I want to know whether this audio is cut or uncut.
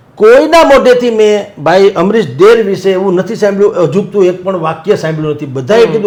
uncut